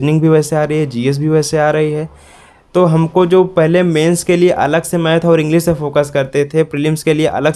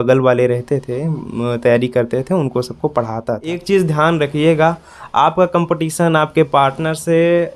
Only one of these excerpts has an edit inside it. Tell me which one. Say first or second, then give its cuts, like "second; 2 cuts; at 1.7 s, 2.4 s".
second; 1 cut; at 3.6 s